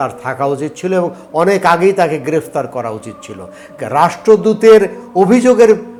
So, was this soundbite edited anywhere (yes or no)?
no